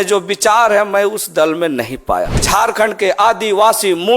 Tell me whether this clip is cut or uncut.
cut